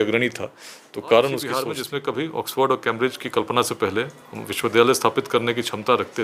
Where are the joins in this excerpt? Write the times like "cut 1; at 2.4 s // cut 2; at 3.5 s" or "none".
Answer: cut 1; at 1.6 s